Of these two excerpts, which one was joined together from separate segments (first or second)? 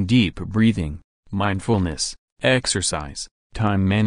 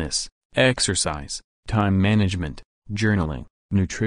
first